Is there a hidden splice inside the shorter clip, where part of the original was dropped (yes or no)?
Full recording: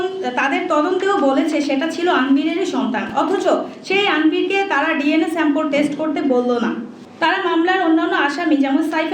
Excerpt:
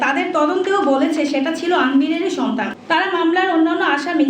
yes